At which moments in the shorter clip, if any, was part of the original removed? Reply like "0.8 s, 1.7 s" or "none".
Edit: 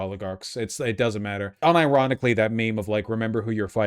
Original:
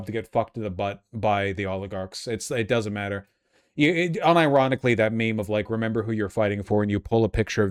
1.6 s